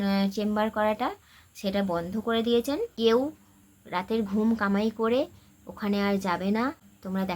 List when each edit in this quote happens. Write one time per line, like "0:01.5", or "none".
0:02.9